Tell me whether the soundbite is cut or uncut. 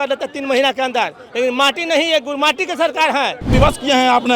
cut